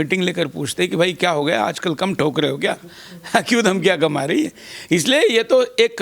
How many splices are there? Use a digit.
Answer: 0